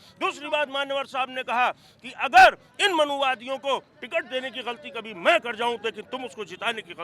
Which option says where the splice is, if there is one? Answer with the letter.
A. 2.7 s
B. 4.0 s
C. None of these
C